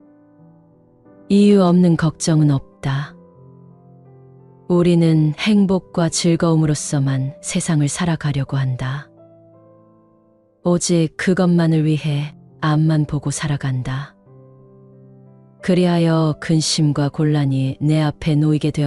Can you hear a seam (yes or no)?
yes